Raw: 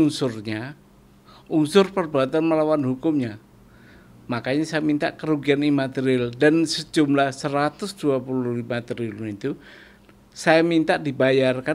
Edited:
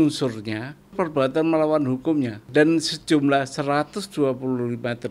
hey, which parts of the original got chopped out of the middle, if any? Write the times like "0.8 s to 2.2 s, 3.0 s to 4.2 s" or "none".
0.9 s to 1.9 s, 3.4 s to 6.3 s